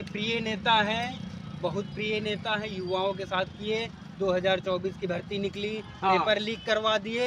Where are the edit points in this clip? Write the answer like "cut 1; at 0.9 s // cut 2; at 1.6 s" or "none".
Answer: none